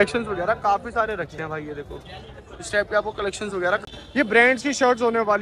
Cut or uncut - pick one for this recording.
cut